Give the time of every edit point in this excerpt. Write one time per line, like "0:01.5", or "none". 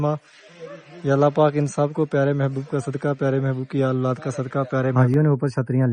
0:04.9

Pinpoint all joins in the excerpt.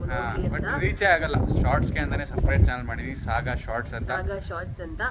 0:01.4

